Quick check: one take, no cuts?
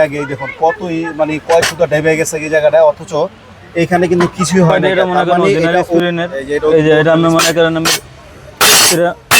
no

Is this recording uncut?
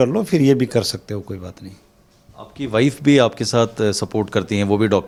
yes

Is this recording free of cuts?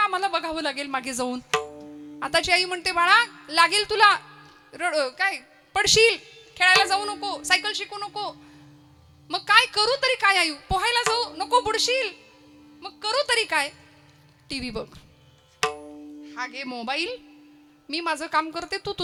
yes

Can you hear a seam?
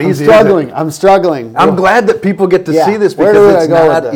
no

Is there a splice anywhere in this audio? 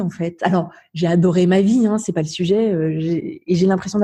no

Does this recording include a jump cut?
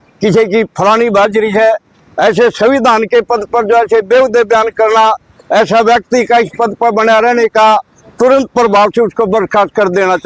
no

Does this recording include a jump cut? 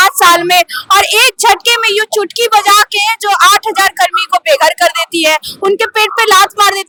no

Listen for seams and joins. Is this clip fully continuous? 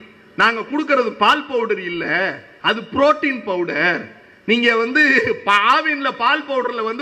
yes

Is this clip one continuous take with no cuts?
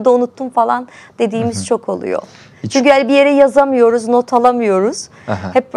yes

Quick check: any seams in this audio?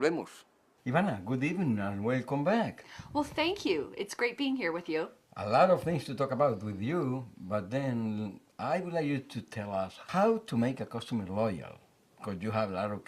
yes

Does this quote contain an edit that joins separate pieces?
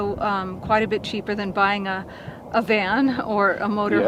no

